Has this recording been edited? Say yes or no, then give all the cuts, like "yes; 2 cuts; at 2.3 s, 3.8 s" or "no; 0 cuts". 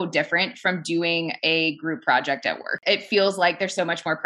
yes; 1 cut; at 2.8 s